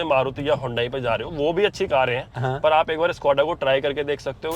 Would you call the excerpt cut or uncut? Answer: uncut